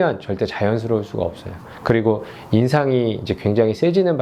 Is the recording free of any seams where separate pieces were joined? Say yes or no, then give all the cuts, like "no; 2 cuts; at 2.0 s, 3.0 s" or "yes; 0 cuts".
yes; 0 cuts